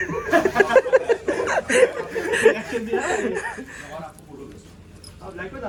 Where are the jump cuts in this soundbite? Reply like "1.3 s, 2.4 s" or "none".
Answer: none